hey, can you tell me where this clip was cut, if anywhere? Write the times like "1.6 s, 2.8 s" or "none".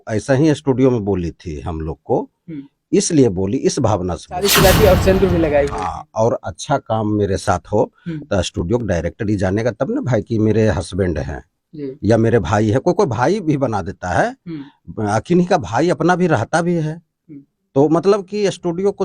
4.5 s